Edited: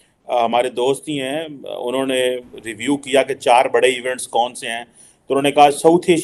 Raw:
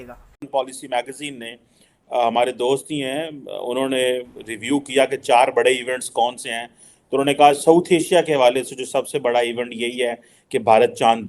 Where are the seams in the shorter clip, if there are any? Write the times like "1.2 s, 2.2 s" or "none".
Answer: none